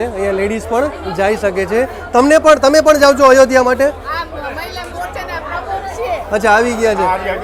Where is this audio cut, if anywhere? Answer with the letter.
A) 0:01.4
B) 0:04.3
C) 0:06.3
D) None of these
D